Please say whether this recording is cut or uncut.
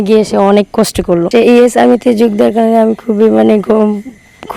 cut